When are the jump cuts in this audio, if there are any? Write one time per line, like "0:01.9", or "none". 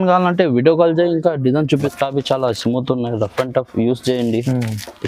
0:01.9

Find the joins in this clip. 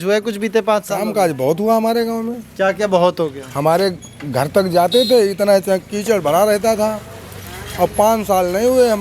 none

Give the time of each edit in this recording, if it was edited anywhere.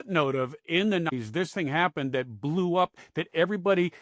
0:01.1

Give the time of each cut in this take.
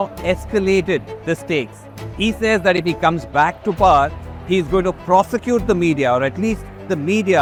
none

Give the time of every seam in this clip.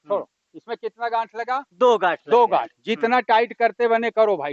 none

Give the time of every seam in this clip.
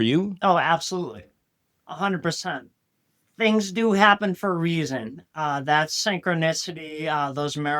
0:02.7

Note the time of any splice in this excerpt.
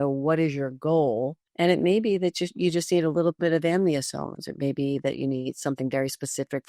0:01.4

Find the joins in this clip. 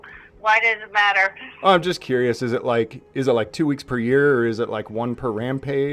none

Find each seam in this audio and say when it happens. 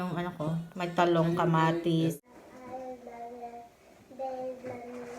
0:02.1

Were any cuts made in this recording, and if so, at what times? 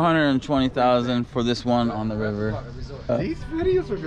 0:03.1

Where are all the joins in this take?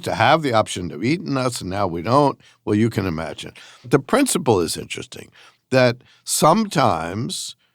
0:03.9

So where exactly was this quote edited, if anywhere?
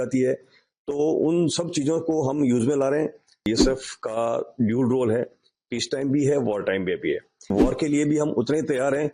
0:03.5
0:07.5

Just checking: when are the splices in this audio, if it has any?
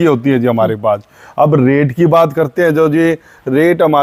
none

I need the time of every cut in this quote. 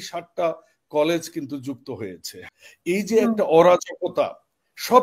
0:02.3

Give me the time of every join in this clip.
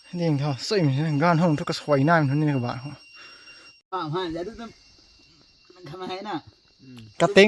none

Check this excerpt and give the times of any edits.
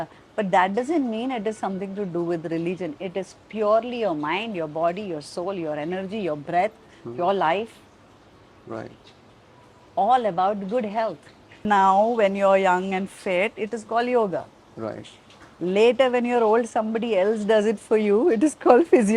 0:11.6

